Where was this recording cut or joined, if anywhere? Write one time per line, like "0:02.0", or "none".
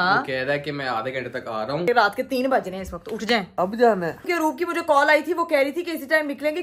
0:01.9
0:03.5
0:04.3